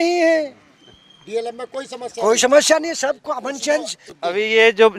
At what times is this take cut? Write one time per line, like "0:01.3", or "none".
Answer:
0:04.0